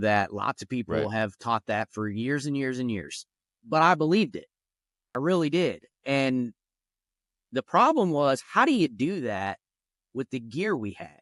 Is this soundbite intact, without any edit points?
no; 1 cut; at 3.6 s

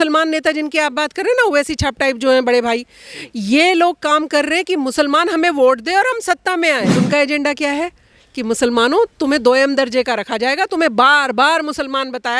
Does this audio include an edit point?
yes; 1 cut; at 6.9 s

